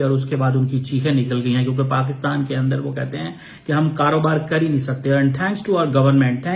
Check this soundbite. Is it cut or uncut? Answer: uncut